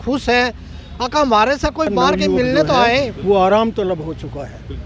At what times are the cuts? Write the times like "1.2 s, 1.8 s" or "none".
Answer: 3.2 s